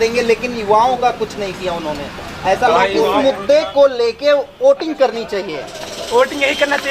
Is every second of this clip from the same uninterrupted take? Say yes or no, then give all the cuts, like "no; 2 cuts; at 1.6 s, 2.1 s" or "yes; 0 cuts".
no; 1 cut; at 3.2 s